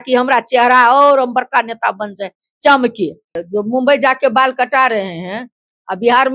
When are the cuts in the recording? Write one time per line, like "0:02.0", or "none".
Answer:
0:03.3